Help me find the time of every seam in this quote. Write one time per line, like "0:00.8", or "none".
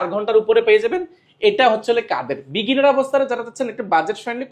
none